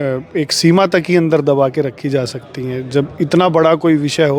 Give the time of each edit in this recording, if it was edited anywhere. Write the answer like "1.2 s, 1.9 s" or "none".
none